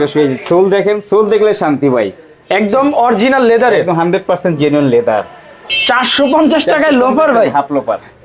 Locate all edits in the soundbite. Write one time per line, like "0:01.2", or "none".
0:05.5

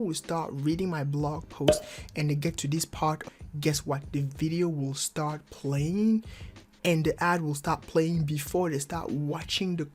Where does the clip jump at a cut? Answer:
0:03.3

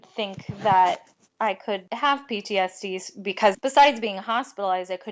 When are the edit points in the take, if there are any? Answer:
0:01.9
0:03.5

